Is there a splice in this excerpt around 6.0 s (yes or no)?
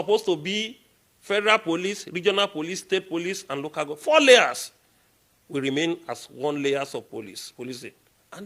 no